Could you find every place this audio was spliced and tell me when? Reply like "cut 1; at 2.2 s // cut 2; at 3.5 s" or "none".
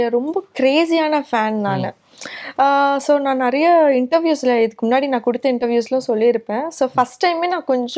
none